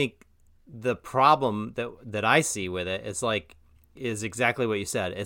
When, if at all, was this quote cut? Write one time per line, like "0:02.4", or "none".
none